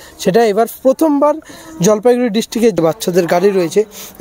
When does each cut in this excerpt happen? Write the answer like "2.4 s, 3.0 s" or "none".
2.8 s